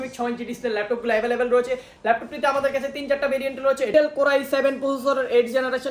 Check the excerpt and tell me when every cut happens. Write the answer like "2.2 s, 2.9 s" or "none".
3.9 s